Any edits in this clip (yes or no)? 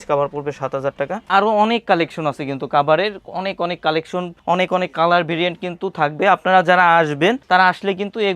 yes